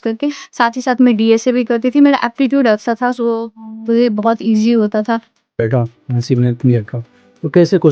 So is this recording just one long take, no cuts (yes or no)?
no